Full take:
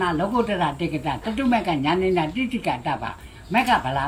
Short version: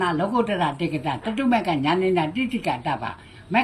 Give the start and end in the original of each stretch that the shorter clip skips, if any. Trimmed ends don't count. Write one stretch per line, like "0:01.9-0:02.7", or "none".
none